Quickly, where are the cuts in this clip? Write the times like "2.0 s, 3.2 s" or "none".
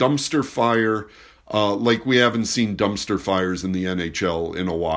none